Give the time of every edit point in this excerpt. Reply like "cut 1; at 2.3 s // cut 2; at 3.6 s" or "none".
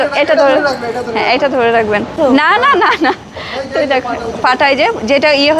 cut 1; at 2.1 s